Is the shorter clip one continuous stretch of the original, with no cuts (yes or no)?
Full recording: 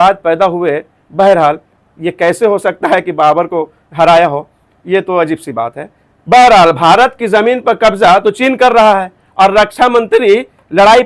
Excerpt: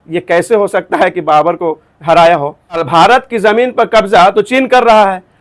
no